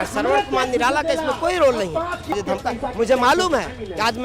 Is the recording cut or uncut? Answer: cut